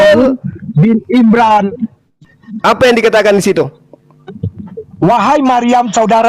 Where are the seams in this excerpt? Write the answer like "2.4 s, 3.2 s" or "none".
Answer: 2.1 s